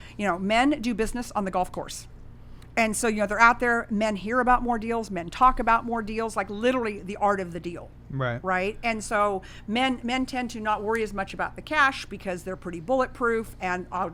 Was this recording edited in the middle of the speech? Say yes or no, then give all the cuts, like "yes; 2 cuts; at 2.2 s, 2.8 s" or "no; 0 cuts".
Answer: no; 0 cuts